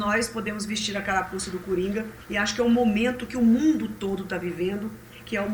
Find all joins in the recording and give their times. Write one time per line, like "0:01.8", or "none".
0:02.2